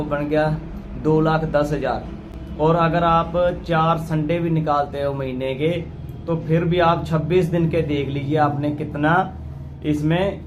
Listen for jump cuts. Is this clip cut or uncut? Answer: uncut